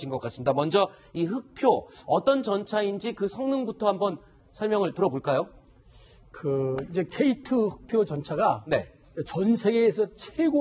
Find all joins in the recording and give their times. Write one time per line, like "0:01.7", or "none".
none

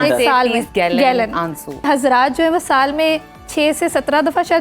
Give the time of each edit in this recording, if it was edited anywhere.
0:01.9

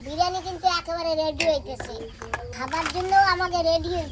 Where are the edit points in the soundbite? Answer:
none

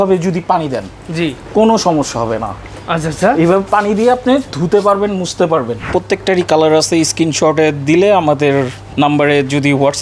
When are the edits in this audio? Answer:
0:05.9
0:08.8

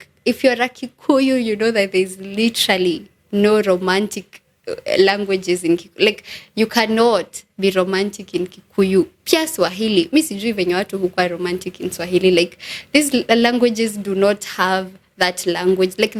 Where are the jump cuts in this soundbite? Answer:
none

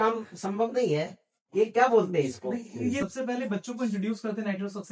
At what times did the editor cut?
0:03.0

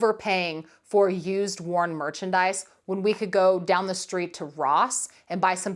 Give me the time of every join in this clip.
none

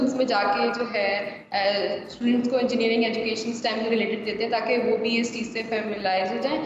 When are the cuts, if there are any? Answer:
none

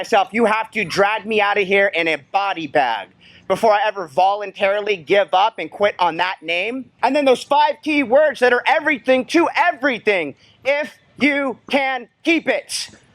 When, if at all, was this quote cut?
0:06.9

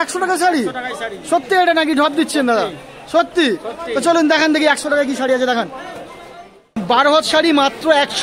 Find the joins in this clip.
0:06.8

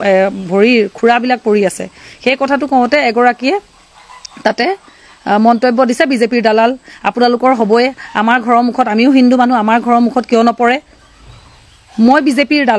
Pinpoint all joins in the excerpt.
none

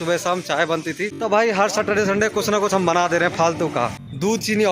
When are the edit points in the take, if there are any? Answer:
0:01.1
0:03.9

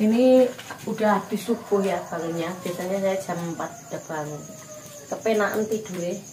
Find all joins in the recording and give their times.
none

